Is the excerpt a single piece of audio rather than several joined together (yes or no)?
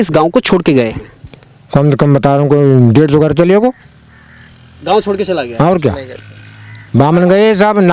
yes